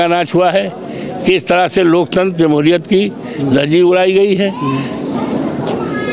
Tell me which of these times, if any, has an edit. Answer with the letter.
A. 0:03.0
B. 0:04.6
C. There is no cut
C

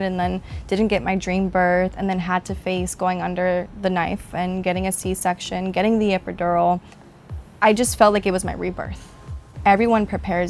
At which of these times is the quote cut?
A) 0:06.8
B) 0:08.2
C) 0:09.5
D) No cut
C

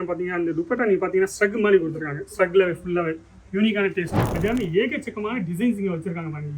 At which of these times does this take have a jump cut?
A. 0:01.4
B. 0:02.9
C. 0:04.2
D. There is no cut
C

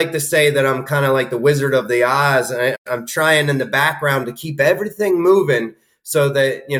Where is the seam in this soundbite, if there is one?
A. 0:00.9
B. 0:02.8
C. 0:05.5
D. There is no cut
B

